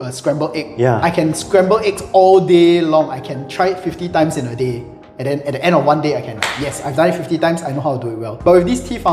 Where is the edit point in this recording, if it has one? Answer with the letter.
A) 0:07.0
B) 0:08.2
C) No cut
B